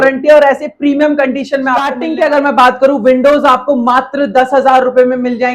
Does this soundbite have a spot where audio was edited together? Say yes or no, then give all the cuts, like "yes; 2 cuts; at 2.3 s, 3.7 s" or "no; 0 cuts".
yes; 1 cut; at 2.0 s